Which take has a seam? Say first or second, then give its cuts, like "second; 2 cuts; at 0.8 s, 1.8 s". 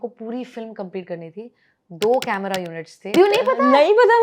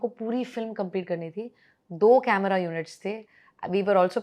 first; 1 cut; at 3.1 s